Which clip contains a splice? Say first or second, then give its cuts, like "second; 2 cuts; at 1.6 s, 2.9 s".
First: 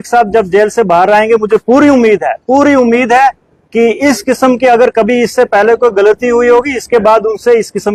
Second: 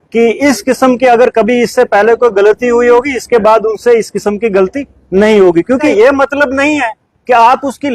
second; 1 cut; at 5.9 s